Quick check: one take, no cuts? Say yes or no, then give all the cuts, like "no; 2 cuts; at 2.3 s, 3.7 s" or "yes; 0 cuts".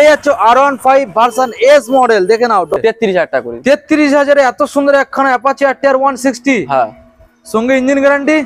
no; 1 cut; at 2.7 s